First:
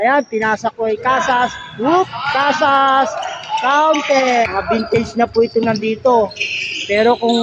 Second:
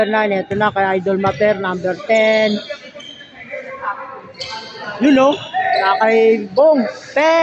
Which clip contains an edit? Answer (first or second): first